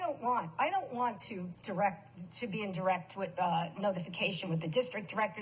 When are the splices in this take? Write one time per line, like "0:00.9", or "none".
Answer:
none